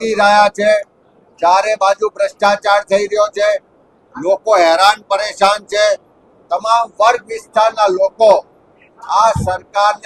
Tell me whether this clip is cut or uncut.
uncut